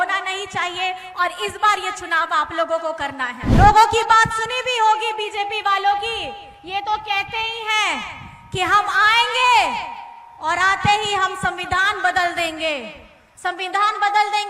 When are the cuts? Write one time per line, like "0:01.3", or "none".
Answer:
0:03.5